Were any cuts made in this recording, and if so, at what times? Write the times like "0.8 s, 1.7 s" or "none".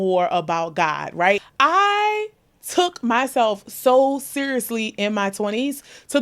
1.4 s